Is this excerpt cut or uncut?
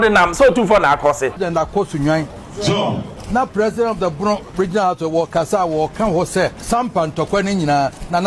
cut